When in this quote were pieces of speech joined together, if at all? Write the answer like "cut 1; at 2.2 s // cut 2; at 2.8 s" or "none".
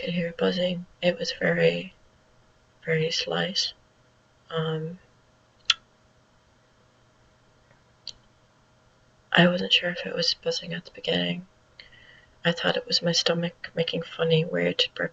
none